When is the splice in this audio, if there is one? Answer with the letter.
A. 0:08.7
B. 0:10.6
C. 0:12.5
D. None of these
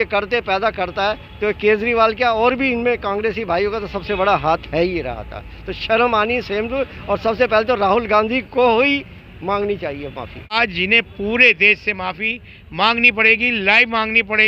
B